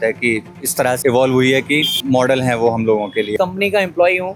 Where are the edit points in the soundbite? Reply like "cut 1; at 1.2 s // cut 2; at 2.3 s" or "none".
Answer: cut 1; at 1.0 s // cut 2; at 2.0 s // cut 3; at 3.3 s